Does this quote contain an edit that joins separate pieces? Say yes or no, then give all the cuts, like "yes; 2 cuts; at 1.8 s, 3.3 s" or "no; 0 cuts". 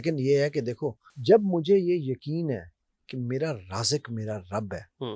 yes; 1 cut; at 1.1 s